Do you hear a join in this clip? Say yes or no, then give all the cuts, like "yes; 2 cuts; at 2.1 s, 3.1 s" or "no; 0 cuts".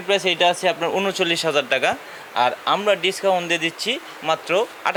no; 0 cuts